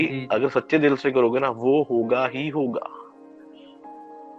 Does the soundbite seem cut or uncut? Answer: uncut